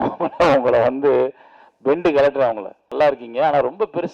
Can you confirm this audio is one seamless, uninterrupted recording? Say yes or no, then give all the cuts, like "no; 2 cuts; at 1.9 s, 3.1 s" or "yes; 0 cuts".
no; 1 cut; at 2.9 s